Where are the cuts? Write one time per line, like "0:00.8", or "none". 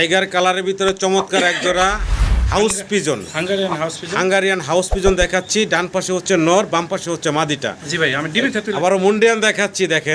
0:08.8